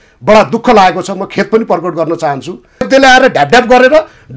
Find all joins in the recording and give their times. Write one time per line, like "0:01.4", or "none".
0:02.9